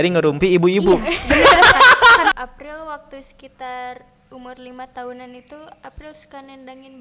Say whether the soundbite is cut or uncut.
cut